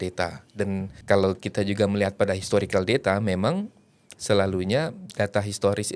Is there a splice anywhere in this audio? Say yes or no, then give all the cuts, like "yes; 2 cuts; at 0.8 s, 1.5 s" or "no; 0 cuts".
yes; 1 cut; at 0.9 s